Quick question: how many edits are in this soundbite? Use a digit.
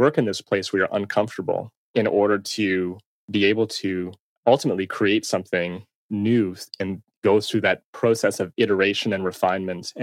3